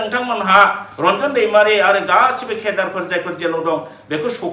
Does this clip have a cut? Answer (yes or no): no